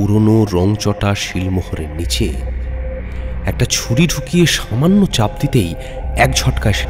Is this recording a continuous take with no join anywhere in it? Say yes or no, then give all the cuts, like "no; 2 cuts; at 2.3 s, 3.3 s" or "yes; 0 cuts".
yes; 0 cuts